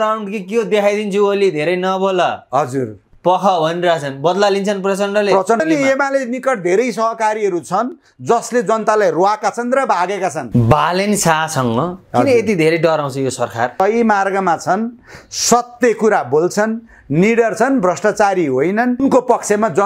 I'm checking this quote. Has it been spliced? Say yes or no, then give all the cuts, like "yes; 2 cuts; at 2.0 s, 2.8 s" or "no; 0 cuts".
yes; 4 cuts; at 5.6 s, 10.4 s, 13.7 s, 19.0 s